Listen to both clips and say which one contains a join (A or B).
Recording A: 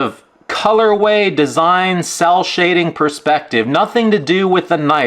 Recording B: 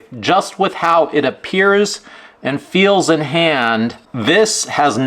B